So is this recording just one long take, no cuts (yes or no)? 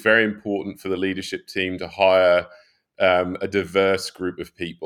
yes